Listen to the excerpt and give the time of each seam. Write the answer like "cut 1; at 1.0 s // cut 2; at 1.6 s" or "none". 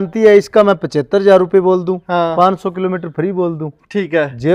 none

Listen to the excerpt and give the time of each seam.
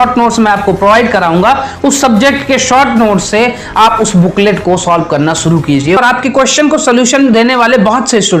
cut 1; at 6.0 s

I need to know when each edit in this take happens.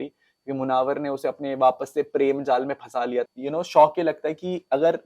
cut 1; at 3.3 s

